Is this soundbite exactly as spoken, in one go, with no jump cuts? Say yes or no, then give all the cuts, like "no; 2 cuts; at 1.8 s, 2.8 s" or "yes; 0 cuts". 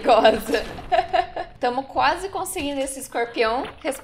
no; 1 cut; at 1.4 s